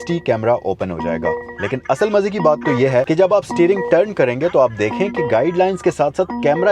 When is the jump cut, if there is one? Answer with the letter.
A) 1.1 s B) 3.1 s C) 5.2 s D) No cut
B